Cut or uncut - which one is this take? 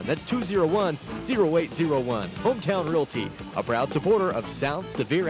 uncut